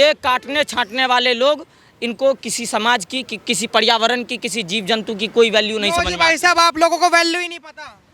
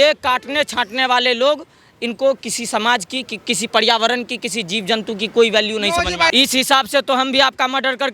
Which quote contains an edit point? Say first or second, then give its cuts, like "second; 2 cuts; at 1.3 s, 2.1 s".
second; 1 cut; at 6.3 s